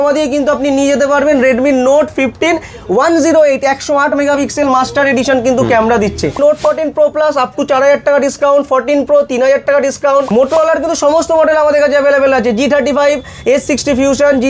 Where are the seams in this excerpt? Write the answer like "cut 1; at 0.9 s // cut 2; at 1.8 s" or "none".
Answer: cut 1; at 6.4 s // cut 2; at 10.3 s